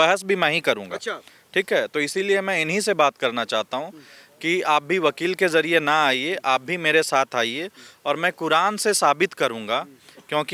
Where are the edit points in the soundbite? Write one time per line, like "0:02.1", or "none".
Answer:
none